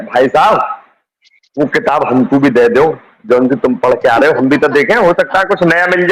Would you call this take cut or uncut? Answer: uncut